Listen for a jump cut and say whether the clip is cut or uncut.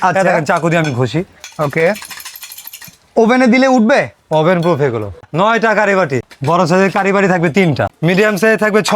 cut